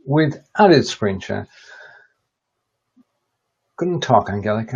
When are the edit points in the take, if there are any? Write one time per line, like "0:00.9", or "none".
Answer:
none